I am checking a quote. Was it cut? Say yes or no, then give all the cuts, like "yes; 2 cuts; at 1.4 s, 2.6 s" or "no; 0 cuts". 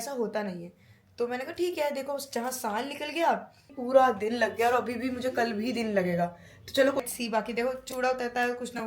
yes; 2 cuts; at 3.8 s, 7.0 s